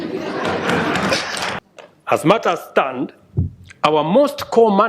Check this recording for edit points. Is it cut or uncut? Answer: cut